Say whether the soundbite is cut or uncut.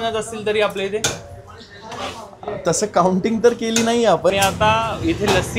cut